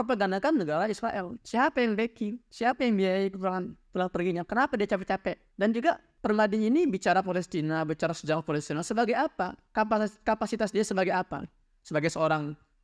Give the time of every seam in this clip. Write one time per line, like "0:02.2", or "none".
none